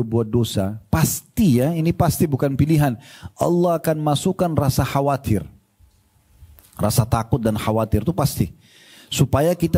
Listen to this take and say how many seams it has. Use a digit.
0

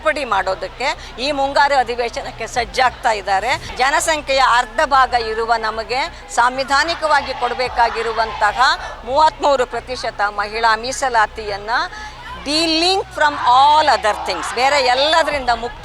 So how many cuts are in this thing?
1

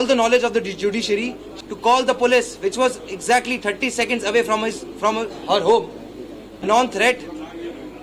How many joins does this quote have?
2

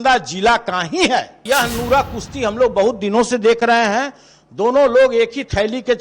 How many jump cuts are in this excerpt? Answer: 1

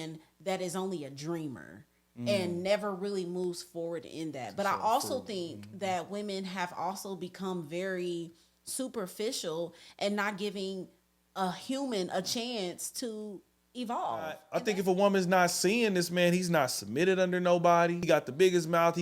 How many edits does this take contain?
2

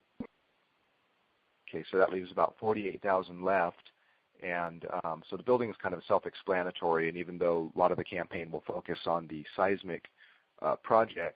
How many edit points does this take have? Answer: 1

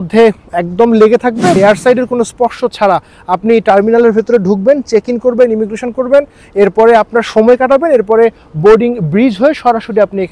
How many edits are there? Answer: 1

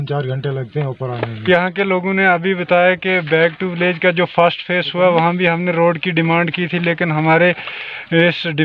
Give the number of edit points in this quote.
1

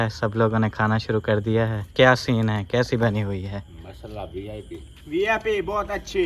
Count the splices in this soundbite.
1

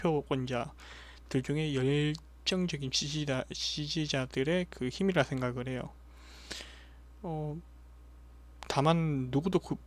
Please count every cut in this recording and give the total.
1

